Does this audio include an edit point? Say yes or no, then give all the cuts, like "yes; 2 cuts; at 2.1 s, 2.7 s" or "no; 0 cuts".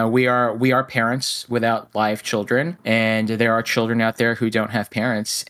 yes; 1 cut; at 2.8 s